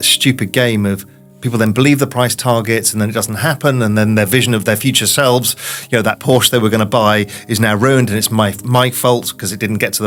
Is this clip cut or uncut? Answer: uncut